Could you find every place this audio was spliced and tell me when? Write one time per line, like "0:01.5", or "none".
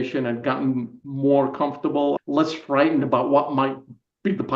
0:01.0
0:02.2